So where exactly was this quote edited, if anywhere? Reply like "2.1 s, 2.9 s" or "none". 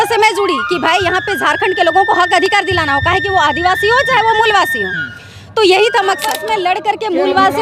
6.3 s